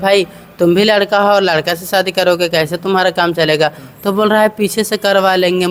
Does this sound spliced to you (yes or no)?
no